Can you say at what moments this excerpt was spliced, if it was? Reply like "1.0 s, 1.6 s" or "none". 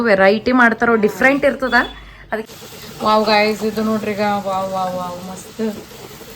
2.4 s